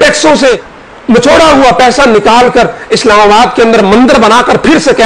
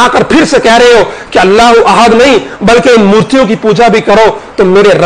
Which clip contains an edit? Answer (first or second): first